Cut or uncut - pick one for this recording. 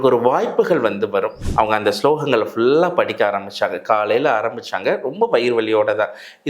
cut